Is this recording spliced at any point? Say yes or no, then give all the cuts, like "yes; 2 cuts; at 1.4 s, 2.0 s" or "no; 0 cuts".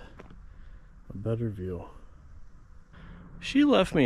yes; 1 cut; at 3.0 s